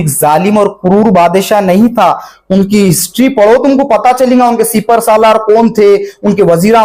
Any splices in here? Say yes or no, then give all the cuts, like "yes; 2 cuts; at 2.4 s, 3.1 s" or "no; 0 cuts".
no; 0 cuts